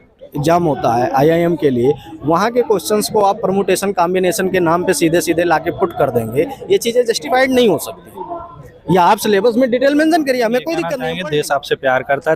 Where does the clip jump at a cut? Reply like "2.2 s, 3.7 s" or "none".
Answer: 11.0 s